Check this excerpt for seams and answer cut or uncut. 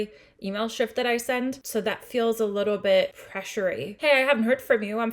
cut